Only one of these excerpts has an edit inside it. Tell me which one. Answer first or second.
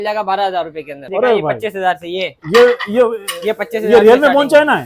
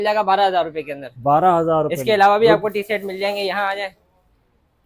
first